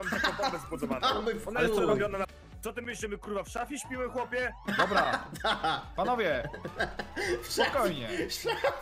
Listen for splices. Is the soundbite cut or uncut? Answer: cut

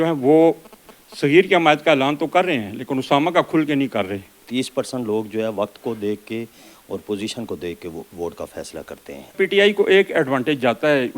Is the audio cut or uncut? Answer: cut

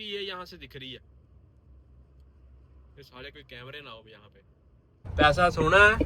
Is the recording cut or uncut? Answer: cut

